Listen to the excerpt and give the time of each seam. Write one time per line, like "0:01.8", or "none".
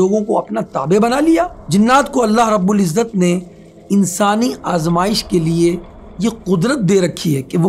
0:01.6